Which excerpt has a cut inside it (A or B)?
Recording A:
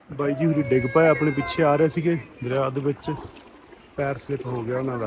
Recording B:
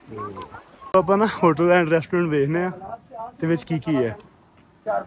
B